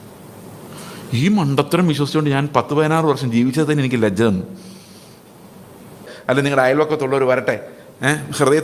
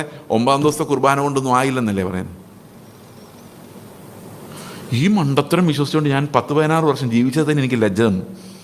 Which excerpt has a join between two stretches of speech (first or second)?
first